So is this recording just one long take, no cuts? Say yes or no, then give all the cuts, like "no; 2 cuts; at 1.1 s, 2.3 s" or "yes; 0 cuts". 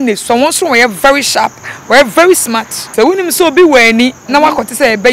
no; 1 cut; at 2.8 s